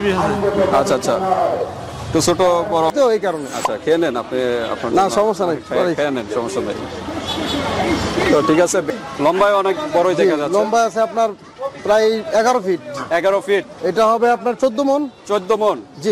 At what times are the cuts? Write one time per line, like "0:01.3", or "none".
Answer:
0:02.9
0:08.9
0:13.7